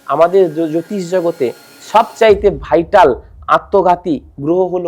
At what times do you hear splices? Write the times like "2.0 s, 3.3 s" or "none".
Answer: none